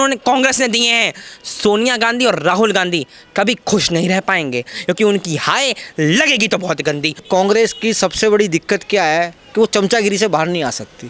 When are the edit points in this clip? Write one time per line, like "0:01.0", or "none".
0:07.2